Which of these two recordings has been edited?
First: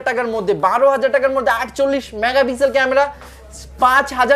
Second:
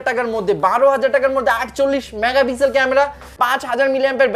second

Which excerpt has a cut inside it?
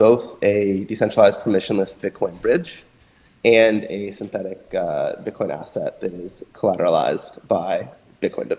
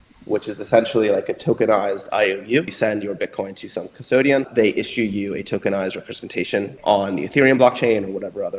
second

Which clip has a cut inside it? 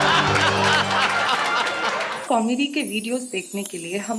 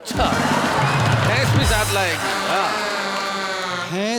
first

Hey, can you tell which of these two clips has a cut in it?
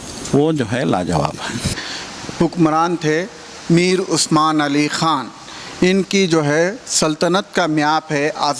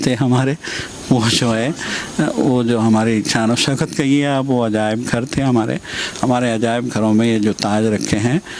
first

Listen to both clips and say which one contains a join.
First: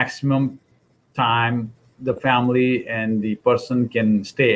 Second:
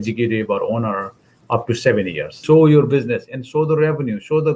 second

